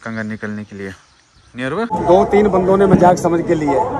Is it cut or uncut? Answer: cut